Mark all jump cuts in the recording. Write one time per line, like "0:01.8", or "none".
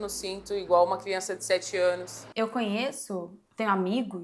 none